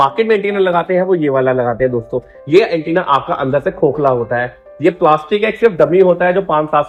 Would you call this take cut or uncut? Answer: uncut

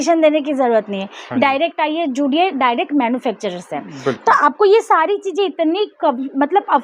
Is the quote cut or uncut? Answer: uncut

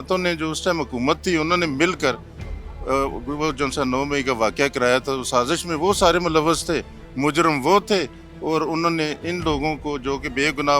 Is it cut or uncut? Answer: uncut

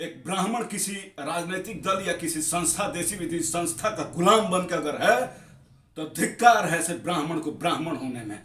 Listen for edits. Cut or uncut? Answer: uncut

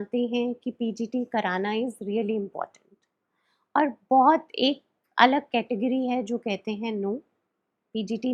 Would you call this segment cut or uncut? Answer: uncut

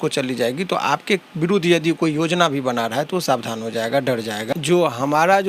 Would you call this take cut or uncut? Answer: cut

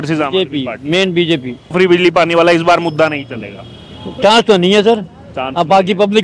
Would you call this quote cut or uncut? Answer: cut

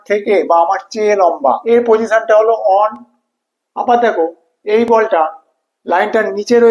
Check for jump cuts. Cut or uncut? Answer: cut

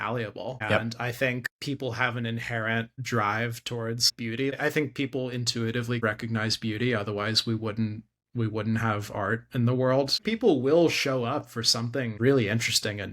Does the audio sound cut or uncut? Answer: cut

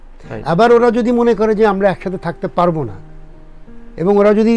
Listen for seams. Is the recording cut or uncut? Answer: uncut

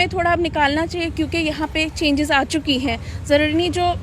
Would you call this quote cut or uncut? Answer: uncut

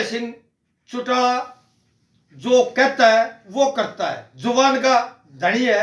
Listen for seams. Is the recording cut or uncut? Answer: uncut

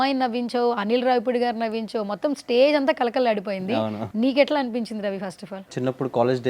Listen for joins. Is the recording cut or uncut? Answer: cut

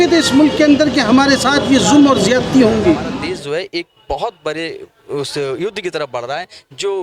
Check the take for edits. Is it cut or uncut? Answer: cut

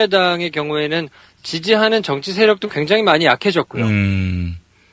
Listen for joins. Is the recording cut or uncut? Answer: cut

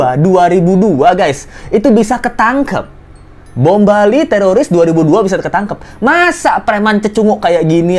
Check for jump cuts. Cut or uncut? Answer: uncut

